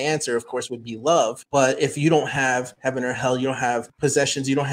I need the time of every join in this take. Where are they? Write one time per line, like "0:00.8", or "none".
0:01.4
0:02.7
0:03.9